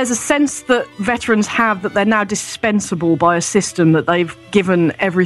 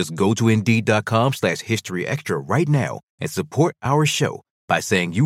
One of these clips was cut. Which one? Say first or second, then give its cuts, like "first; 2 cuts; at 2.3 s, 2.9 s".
first; 2 cuts; at 1.0 s, 4.4 s